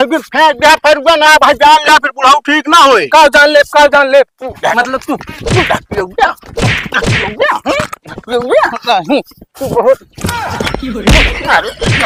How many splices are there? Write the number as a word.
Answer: zero